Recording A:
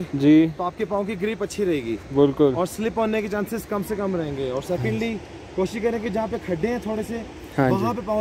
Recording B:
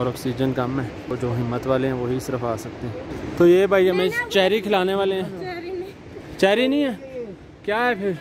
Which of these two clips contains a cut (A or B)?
B